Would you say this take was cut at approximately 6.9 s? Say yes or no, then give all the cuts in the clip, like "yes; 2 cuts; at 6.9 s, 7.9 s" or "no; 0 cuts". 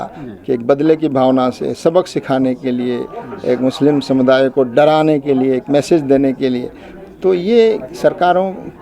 no; 0 cuts